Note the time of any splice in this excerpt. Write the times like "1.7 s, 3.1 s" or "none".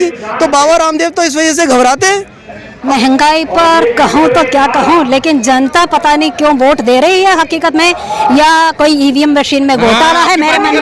2.8 s